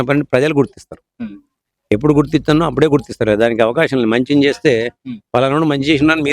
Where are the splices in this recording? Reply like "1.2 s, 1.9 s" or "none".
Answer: none